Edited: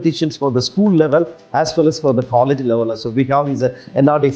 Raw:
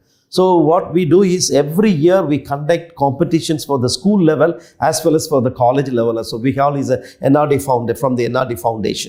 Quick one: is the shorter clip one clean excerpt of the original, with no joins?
yes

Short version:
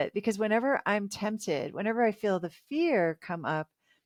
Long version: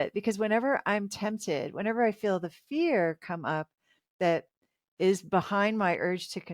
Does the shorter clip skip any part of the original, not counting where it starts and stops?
no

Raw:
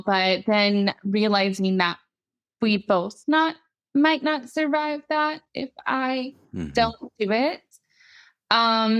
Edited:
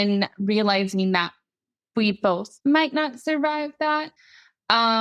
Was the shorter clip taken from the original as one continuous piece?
no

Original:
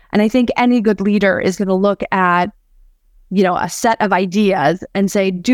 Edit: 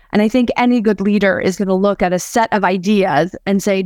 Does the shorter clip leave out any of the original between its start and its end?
yes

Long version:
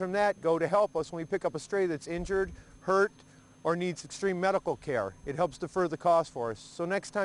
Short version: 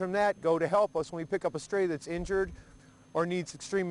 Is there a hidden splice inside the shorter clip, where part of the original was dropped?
yes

